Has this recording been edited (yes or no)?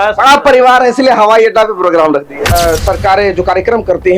yes